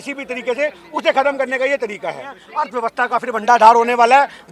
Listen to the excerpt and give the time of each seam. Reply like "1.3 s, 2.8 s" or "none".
2.3 s